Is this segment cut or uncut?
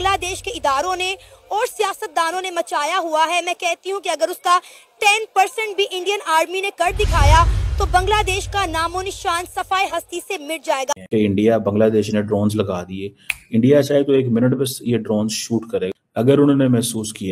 cut